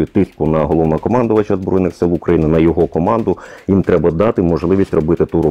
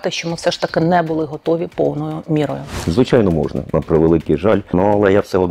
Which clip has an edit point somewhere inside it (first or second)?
second